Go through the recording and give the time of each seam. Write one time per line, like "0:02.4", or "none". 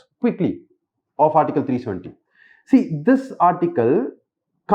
none